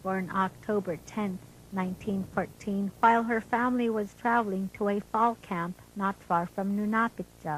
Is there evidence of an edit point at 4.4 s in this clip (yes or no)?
no